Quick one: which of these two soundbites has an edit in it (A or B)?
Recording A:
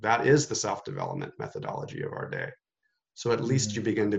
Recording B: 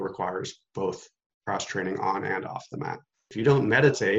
B